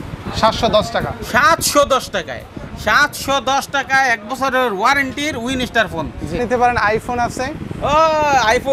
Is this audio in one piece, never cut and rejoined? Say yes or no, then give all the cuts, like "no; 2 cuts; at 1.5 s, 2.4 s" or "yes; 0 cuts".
no; 1 cut; at 6.4 s